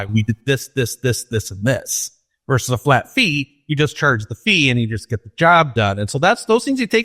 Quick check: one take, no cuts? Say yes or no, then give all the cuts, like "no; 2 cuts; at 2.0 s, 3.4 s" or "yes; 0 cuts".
yes; 0 cuts